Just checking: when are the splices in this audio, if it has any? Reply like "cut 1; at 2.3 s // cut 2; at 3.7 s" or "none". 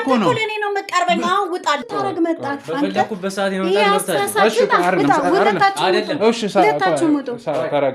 cut 1; at 1.9 s